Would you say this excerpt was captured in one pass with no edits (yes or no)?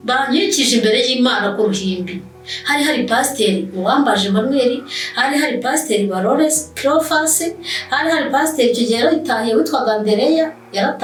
yes